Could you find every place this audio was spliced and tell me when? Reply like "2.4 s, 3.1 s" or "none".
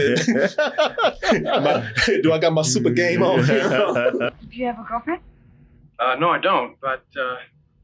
4.3 s